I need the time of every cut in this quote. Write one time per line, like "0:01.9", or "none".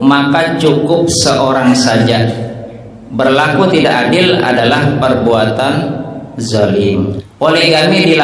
0:07.2